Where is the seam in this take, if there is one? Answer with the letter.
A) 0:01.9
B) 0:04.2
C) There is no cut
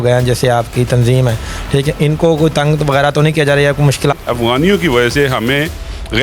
B